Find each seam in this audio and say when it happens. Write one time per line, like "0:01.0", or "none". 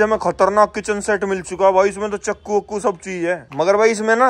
none